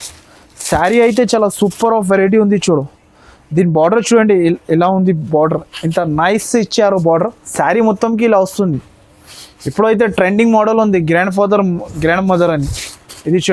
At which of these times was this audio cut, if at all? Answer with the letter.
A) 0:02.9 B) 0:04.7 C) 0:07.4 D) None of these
C